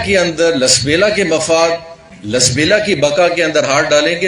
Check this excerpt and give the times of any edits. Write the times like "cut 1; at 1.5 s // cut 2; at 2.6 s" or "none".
none